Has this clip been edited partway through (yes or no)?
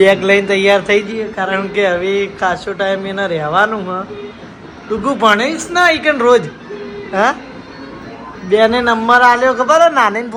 no